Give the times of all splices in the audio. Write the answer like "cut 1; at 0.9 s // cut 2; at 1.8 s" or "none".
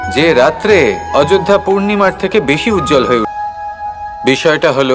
cut 1; at 3.3 s

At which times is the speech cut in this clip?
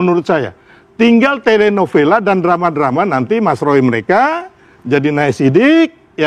none

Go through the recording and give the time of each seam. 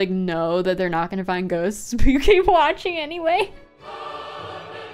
cut 1; at 3.5 s

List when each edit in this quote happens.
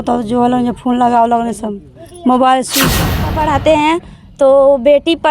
cut 1; at 3.2 s

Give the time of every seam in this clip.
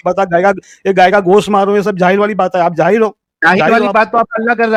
none

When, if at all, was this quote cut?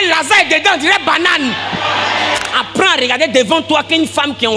cut 1; at 2.5 s

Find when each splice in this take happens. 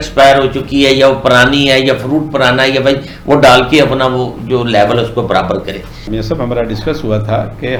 none

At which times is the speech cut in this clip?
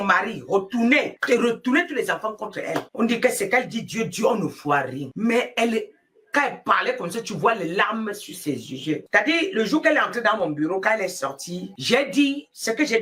none

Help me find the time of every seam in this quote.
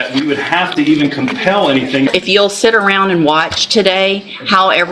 cut 1; at 2.1 s

